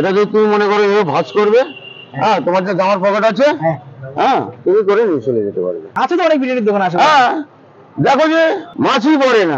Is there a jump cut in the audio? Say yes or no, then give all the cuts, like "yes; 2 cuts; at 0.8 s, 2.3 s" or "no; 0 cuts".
yes; 2 cuts; at 5.8 s, 8.7 s